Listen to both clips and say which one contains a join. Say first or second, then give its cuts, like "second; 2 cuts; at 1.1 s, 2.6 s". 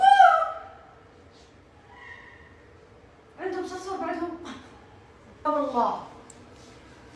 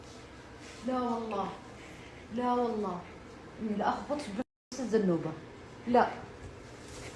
first; 1 cut; at 5.5 s